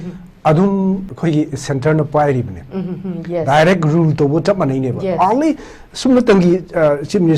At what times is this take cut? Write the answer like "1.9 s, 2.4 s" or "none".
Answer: 1.1 s

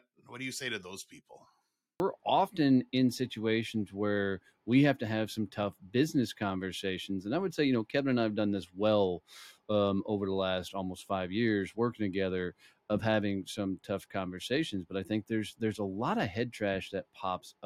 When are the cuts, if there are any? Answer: 2.0 s

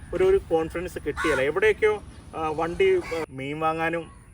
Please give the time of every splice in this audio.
3.3 s

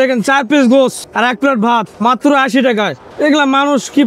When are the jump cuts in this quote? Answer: 1.0 s, 1.9 s, 3.0 s

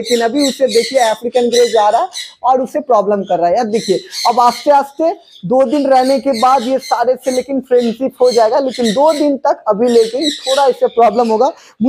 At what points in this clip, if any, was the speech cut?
none

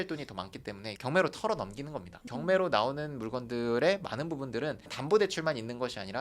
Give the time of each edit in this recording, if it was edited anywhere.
2.1 s

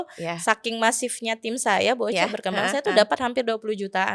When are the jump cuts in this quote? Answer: none

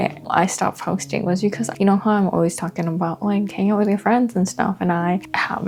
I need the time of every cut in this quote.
none

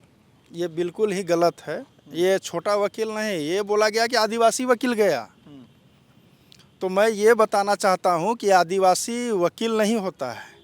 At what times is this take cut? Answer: none

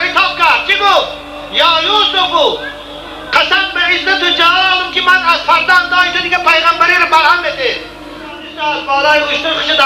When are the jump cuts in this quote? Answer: 8.5 s

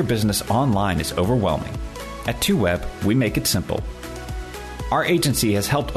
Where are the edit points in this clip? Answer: none

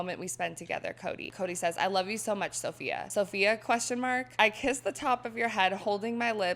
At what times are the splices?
1.3 s, 3.0 s, 4.3 s

